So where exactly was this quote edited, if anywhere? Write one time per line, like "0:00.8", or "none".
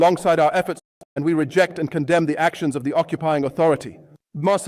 0:00.9